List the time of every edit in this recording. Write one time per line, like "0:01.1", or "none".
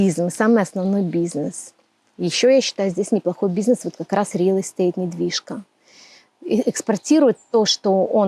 none